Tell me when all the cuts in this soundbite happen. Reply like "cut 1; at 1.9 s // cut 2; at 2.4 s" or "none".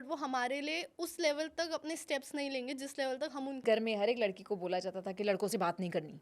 cut 1; at 3.6 s